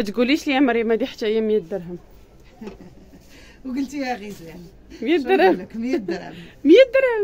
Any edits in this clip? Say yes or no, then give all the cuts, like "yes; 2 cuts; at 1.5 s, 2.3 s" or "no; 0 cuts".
no; 0 cuts